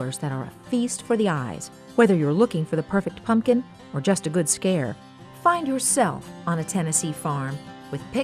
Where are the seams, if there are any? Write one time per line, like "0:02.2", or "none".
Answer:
none